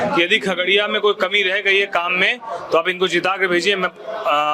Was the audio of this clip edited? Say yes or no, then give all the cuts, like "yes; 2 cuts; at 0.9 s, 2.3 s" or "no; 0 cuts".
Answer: no; 0 cuts